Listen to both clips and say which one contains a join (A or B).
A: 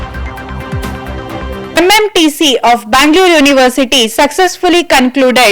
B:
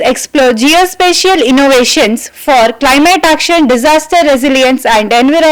A